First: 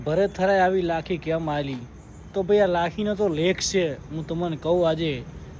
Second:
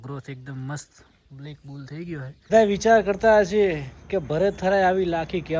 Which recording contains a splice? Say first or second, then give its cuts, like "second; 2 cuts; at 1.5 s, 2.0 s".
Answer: second; 1 cut; at 2.5 s